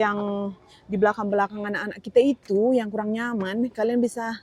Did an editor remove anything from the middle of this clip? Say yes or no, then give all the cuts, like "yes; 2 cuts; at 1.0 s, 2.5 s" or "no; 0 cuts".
no; 0 cuts